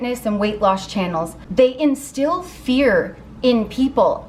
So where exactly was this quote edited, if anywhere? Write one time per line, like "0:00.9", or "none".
0:01.4